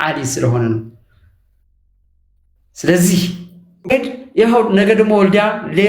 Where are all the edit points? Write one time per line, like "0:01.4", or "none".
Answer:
0:03.9